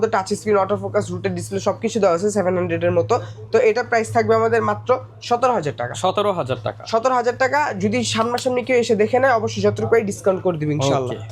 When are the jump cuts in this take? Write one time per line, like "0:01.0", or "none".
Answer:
none